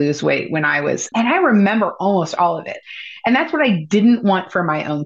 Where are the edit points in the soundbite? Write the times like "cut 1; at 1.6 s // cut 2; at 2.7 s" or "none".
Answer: cut 1; at 1.1 s // cut 2; at 2.7 s